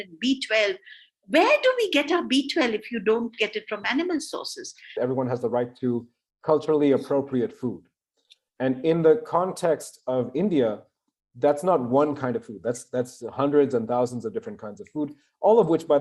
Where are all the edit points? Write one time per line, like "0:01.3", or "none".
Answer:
0:05.0